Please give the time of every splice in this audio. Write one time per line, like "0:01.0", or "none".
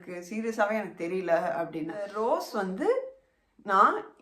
0:02.1